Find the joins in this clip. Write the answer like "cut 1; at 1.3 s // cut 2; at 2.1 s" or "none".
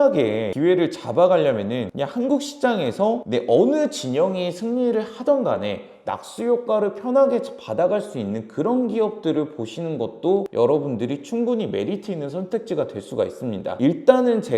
none